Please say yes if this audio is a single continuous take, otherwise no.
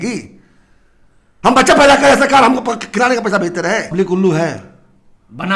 no